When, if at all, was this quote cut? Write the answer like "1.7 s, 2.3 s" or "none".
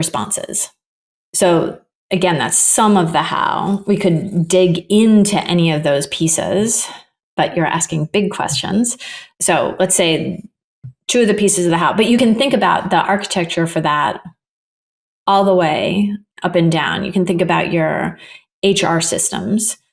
none